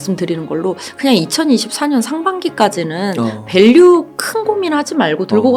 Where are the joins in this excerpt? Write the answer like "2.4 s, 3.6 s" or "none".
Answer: none